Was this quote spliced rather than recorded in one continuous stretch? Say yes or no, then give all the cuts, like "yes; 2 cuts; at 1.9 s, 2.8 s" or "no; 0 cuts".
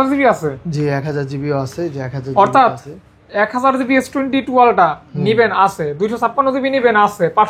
no; 0 cuts